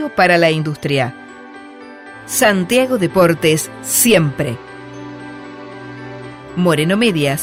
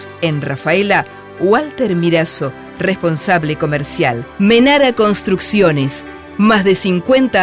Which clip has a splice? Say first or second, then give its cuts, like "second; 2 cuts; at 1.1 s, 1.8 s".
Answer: second; 1 cut; at 4.3 s